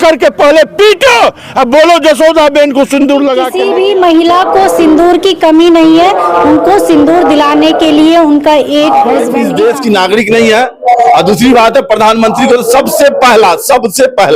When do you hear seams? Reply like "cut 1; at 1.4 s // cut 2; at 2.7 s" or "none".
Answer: cut 1; at 3.5 s // cut 2; at 9.5 s